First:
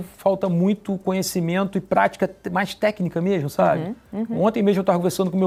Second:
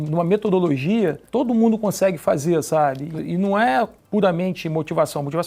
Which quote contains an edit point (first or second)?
second